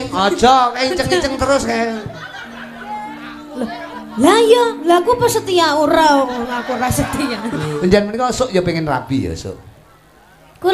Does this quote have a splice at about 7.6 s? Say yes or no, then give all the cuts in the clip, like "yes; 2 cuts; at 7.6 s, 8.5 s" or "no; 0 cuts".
yes; 1 cut; at 7.6 s